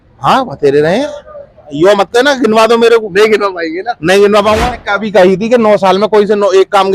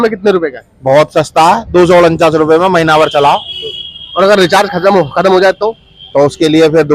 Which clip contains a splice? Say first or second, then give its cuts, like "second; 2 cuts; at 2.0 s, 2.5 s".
first; 2 cuts; at 1.6 s, 4.7 s